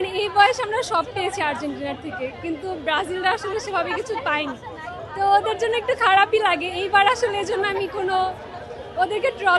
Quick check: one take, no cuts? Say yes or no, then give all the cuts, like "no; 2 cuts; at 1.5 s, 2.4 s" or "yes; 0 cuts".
yes; 0 cuts